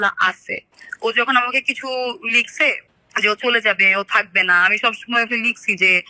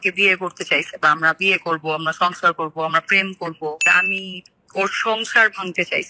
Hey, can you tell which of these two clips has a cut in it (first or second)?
second